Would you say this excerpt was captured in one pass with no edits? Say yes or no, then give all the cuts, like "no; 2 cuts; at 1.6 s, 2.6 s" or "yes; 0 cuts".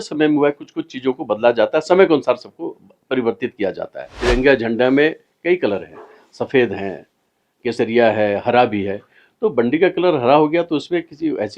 no; 1 cut; at 4.1 s